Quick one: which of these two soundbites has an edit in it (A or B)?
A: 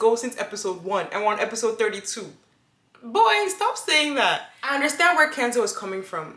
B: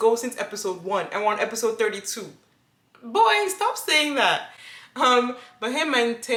A